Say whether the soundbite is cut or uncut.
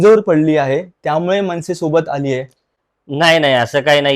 uncut